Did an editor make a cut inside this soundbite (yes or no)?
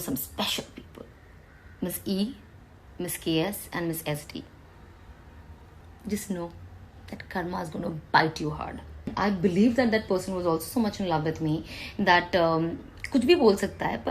yes